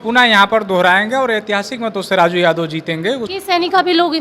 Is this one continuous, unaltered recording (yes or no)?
no